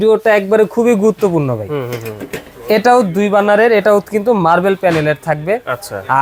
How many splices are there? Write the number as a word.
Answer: zero